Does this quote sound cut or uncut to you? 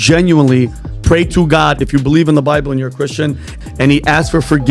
cut